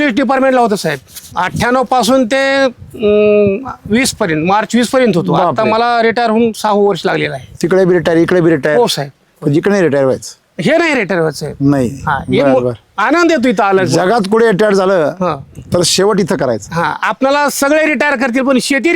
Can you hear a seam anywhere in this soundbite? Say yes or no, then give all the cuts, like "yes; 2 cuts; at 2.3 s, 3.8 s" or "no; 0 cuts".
yes; 1 cut; at 1.3 s